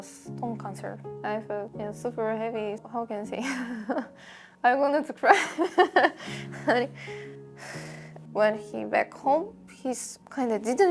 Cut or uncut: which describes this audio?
cut